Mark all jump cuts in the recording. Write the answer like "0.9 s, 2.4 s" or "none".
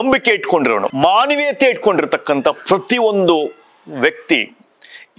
0.9 s